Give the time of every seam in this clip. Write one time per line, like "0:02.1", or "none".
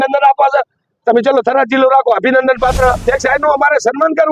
0:03.0